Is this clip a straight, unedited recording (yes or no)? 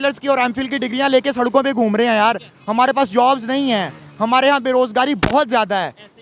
yes